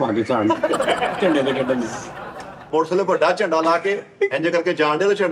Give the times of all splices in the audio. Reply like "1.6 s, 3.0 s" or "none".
2.6 s